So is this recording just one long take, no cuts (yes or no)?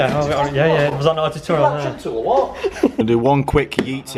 yes